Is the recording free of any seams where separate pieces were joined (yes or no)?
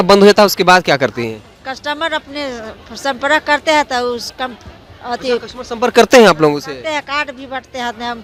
yes